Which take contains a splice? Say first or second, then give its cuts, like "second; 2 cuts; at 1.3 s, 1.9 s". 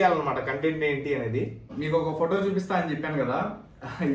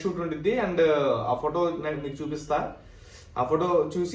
first; 1 cut; at 1.7 s